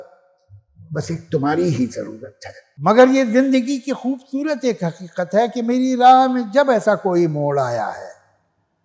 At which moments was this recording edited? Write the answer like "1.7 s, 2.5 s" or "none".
2.7 s